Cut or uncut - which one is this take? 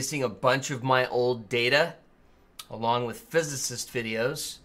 cut